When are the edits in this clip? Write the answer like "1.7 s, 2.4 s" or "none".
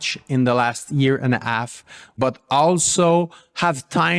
2.1 s